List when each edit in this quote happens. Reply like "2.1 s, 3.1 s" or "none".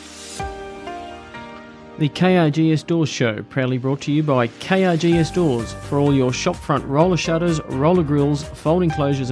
1.9 s